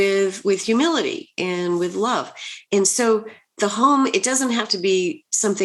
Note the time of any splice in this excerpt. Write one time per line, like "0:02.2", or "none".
0:02.6